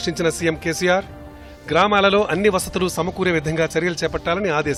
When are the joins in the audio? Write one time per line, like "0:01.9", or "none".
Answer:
none